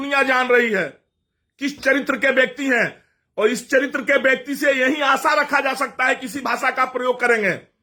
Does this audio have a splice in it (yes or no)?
no